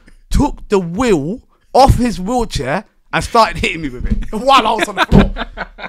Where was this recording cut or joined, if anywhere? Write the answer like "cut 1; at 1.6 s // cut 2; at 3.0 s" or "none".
none